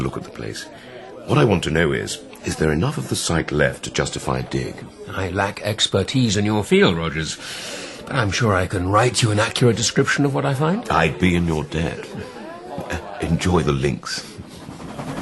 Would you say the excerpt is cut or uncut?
cut